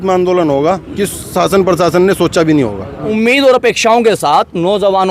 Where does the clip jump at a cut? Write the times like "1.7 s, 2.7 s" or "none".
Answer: 3.1 s